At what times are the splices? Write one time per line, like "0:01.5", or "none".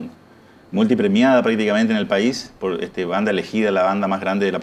none